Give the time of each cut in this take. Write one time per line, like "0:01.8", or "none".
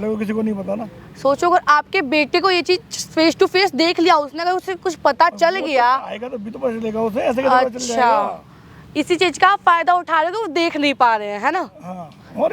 none